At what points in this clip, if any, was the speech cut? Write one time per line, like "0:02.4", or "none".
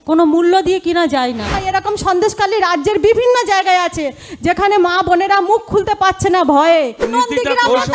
0:01.6
0:07.0